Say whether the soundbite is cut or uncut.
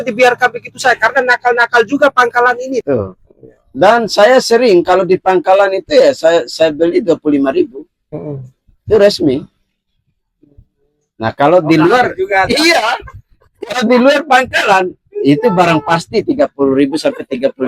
cut